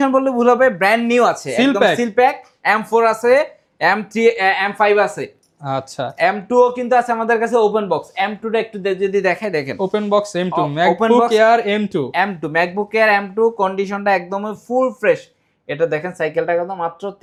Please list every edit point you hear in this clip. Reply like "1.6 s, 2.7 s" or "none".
none